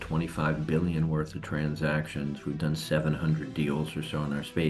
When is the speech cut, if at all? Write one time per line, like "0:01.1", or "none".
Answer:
none